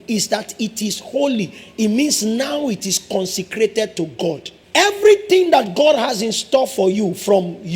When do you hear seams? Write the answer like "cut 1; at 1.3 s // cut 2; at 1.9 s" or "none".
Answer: cut 1; at 4.5 s